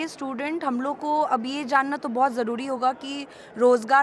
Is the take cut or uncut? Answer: uncut